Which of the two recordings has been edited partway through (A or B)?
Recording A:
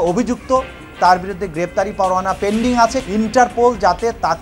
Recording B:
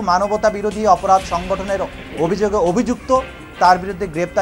A